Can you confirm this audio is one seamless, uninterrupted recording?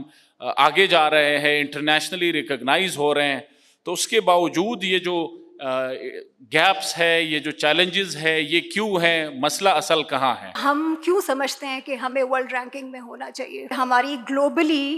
no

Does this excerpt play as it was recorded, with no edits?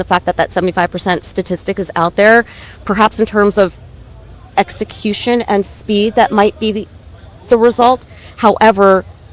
yes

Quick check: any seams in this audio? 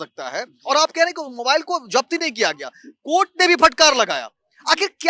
no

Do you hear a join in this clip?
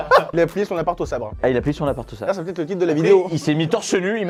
no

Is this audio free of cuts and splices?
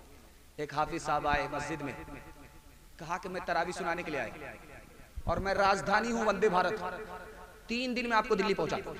yes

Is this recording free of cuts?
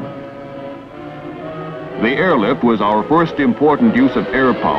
yes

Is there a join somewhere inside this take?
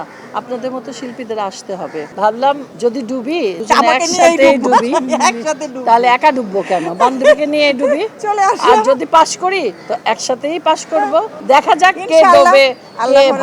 yes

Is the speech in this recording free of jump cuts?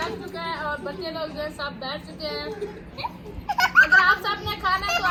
yes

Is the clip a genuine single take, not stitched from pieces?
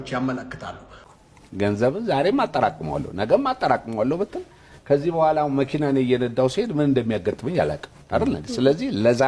no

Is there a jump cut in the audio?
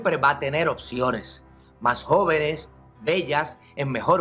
yes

